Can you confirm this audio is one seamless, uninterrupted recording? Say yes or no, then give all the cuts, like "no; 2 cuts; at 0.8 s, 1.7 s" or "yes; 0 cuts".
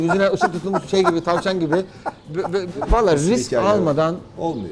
no; 1 cut; at 2.7 s